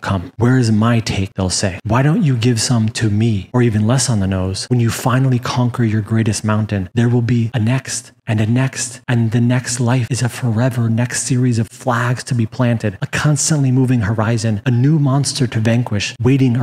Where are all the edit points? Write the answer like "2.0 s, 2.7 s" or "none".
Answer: 1.2 s